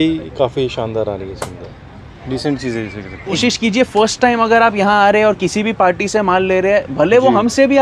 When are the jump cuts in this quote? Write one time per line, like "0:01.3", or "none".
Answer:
none